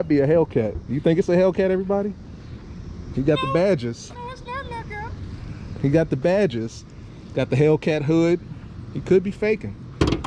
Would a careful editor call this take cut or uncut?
uncut